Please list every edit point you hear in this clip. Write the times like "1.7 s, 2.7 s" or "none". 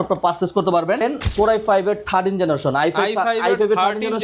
1.0 s

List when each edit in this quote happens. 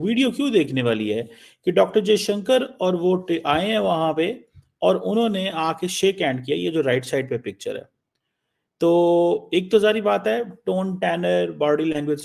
none

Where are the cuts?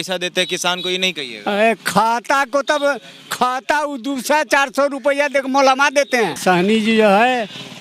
6.4 s

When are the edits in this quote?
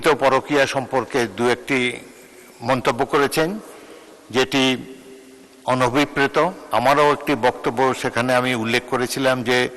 6.6 s

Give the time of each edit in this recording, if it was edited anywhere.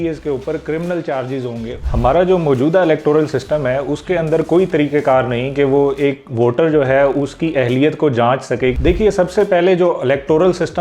1.8 s, 8.8 s

